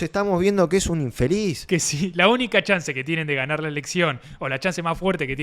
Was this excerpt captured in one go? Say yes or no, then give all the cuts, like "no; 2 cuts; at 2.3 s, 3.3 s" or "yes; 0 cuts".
no; 1 cut; at 1.6 s